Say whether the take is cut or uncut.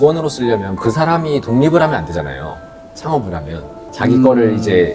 cut